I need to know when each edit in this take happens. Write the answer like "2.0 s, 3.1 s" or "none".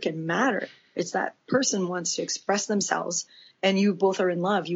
none